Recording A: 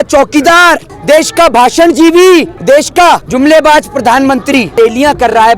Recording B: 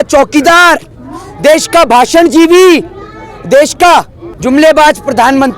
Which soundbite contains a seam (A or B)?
A